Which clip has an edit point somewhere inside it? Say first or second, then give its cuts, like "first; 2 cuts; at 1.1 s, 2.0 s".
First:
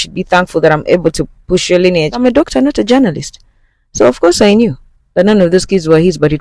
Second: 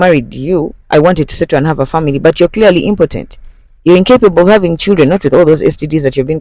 first; 1 cut; at 2.2 s